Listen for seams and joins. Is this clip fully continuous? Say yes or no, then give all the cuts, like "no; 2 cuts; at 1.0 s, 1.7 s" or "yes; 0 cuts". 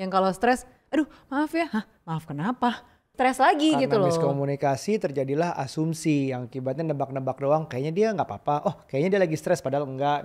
no; 1 cut; at 3.1 s